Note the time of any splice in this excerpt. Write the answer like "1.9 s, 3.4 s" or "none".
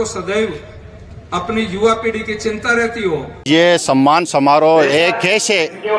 3.3 s